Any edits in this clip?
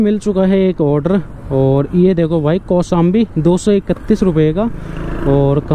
no; 0 cuts

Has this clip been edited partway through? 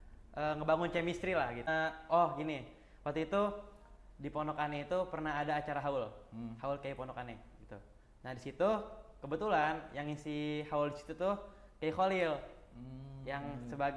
yes; 1 cut; at 1.7 s

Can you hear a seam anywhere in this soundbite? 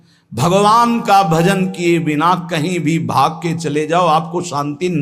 no; 0 cuts

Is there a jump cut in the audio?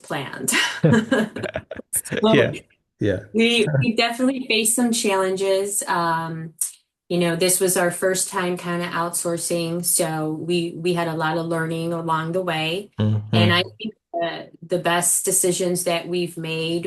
no; 0 cuts

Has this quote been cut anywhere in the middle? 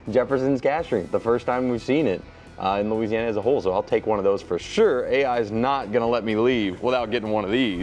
no; 0 cuts

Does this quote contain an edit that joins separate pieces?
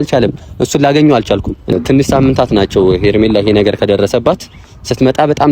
yes; 1 cut; at 1.7 s

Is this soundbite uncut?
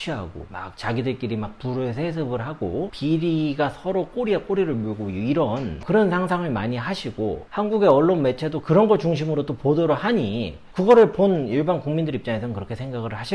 yes; 0 cuts

